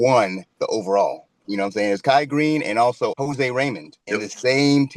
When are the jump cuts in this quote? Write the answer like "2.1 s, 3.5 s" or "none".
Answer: 1.4 s, 3.1 s, 3.9 s

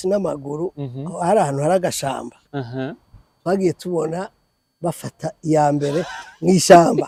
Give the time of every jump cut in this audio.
none

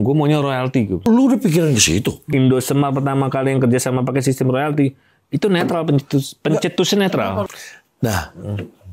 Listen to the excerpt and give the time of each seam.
1.0 s, 2.2 s, 7.5 s

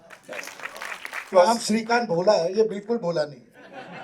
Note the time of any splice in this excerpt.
1.1 s

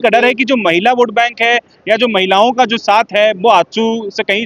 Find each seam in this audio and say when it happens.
none

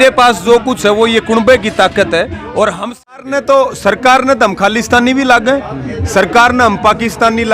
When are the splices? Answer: 3.1 s

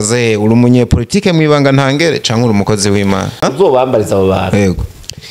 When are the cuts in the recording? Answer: 3.4 s

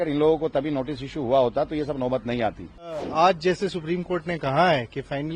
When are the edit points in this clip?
3.0 s

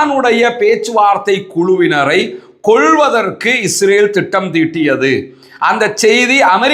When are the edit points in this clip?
none

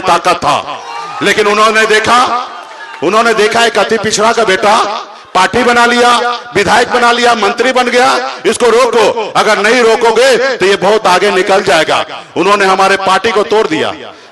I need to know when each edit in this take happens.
none

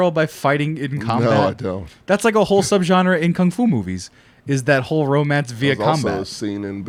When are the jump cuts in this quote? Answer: none

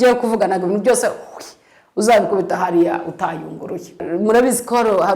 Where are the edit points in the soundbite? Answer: 4.0 s

